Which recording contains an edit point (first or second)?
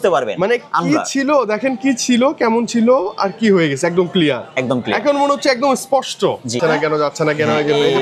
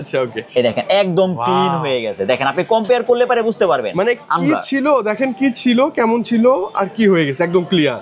first